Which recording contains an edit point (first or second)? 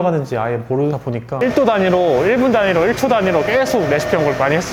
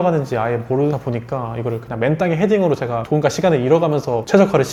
first